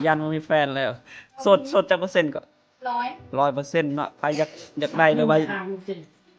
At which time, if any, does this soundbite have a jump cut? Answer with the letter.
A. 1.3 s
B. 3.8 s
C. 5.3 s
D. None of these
D